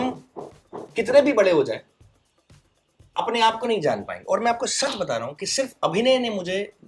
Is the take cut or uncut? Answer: uncut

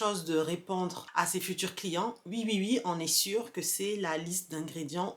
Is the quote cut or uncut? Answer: cut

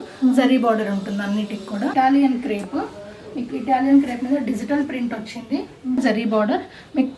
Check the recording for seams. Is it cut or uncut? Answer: cut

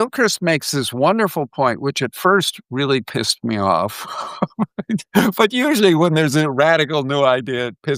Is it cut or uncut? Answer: uncut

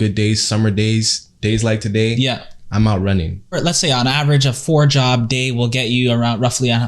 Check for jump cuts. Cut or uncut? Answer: cut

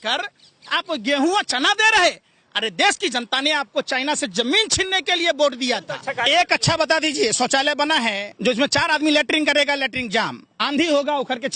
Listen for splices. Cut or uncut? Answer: cut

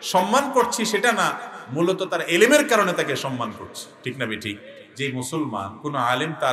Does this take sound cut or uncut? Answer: cut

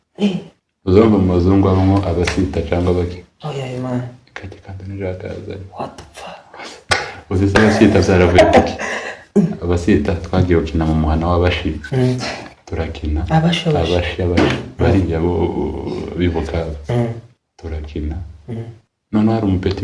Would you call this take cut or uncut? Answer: uncut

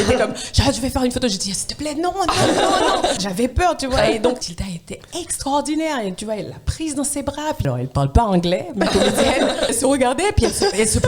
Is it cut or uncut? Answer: cut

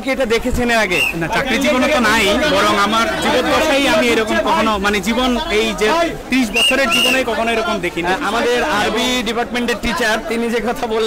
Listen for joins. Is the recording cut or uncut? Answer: uncut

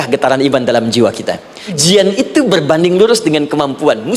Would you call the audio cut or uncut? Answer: cut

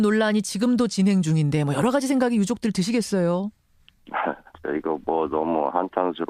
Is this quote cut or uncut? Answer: cut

